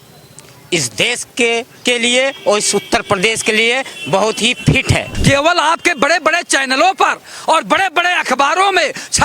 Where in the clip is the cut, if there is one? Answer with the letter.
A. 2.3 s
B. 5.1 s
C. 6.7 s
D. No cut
B